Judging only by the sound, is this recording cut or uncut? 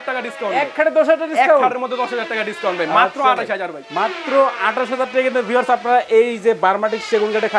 uncut